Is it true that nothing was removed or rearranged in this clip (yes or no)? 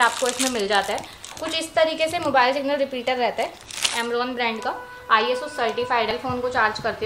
no